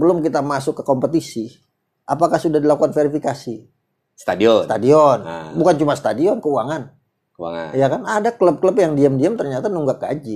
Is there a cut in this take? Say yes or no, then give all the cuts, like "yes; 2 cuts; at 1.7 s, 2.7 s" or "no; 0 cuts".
no; 0 cuts